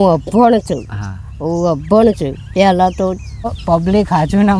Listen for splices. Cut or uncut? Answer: cut